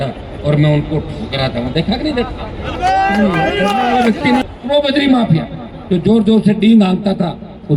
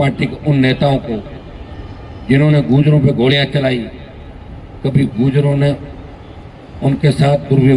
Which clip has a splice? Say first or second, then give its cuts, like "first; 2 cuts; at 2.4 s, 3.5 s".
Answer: first; 1 cut; at 4.4 s